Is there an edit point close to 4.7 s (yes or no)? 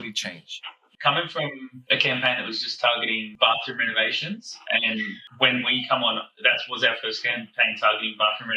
no